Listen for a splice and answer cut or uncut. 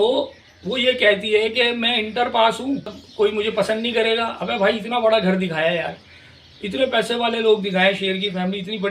cut